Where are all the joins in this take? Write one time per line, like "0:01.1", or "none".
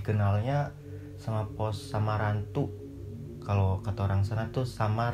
none

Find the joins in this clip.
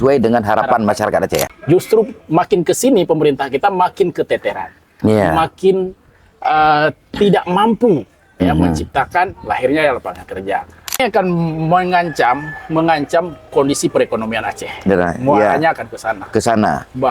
0:01.5
0:11.0

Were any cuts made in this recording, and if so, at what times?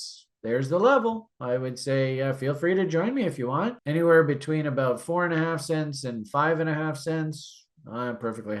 0:03.8

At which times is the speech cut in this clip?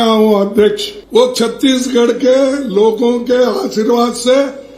0:00.9

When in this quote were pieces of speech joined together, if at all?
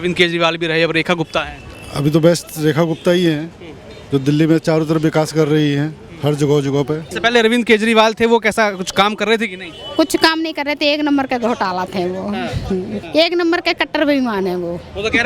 0:07.1
0:13.0

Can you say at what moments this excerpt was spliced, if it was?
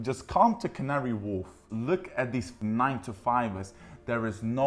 0:01.6
0:02.5

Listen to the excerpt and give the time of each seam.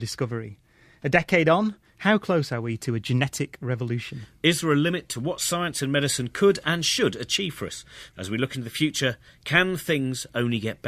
0:07.3

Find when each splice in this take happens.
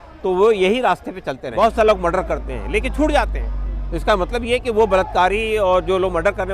0:01.4

